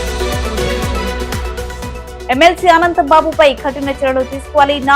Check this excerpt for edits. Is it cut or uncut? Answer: uncut